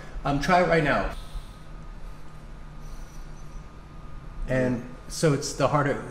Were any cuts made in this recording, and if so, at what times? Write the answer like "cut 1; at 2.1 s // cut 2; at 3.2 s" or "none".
cut 1; at 1.1 s